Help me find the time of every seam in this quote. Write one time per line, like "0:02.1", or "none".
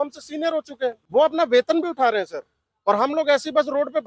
0:01.0